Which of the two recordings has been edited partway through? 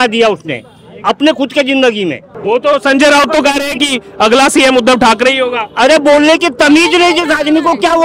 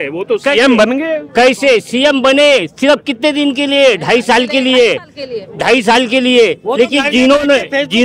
first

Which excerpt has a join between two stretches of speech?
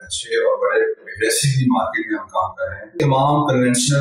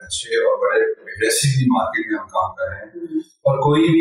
first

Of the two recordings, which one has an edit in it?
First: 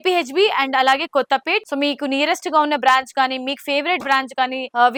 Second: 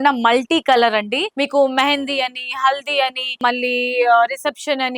second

